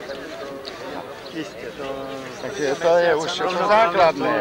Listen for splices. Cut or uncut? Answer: cut